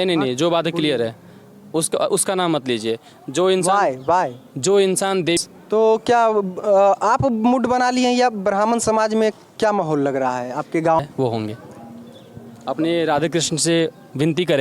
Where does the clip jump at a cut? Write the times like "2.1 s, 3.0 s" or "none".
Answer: 5.4 s, 11.0 s